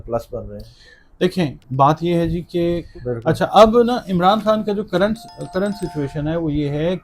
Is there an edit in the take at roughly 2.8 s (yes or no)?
yes